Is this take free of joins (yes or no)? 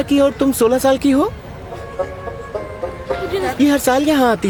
yes